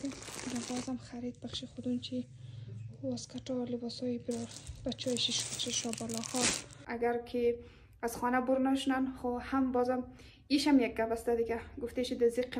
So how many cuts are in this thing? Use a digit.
1